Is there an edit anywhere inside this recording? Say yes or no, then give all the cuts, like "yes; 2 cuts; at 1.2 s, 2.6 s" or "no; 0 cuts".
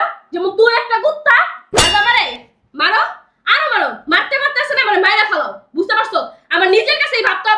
yes; 1 cut; at 1.5 s